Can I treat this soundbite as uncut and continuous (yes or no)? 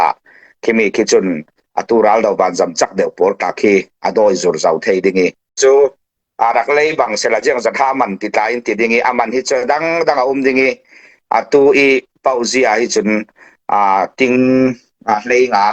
no